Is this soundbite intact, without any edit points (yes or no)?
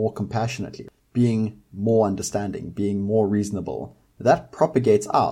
yes